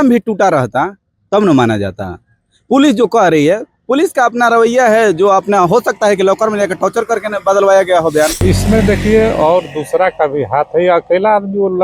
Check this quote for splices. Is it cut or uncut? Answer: cut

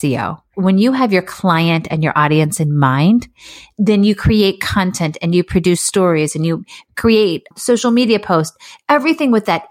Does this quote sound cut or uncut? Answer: uncut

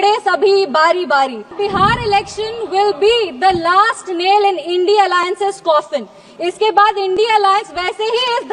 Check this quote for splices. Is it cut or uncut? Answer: cut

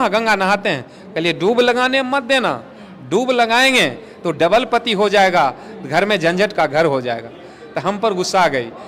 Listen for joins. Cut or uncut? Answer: uncut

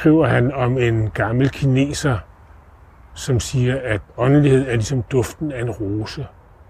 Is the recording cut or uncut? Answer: cut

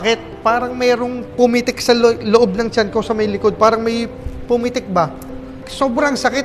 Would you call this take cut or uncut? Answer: uncut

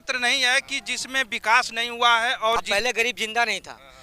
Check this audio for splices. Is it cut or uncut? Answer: cut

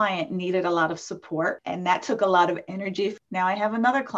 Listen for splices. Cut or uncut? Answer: cut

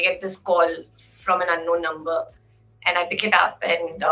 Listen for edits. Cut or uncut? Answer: uncut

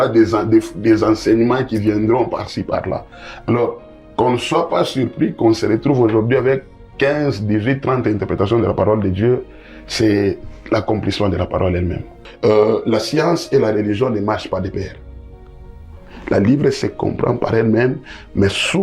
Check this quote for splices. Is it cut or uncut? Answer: cut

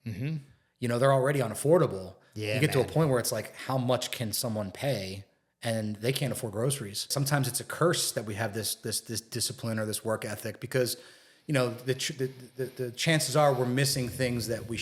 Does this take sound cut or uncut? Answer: cut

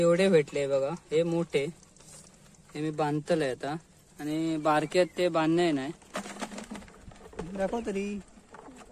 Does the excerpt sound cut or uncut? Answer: cut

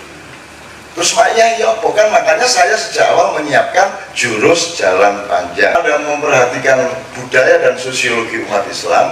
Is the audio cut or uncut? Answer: cut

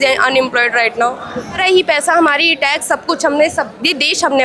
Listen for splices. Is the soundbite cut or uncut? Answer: cut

